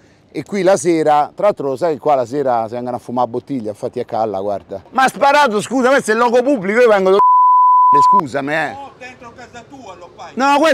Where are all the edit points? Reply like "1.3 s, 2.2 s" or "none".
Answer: 4.8 s